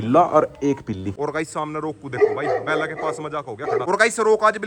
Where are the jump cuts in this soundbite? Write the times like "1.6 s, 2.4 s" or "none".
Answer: 1.2 s, 3.8 s